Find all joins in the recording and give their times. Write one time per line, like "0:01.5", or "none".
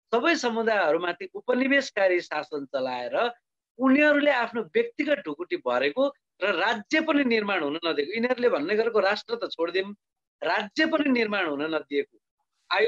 none